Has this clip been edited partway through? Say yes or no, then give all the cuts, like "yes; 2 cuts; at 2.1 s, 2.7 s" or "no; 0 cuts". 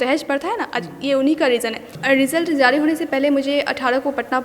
yes; 1 cut; at 1.9 s